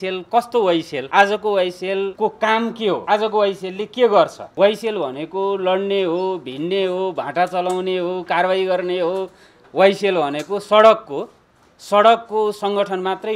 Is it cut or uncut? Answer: cut